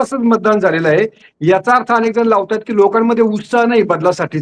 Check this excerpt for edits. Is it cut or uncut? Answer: uncut